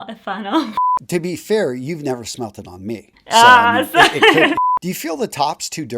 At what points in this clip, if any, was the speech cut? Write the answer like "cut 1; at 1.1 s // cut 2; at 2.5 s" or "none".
cut 1; at 0.8 s // cut 2; at 4.6 s